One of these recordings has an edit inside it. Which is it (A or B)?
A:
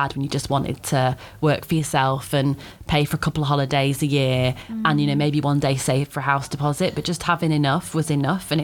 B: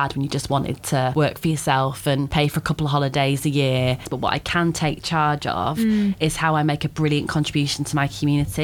B